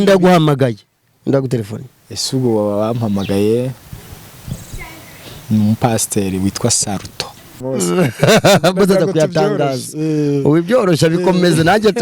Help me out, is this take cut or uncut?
cut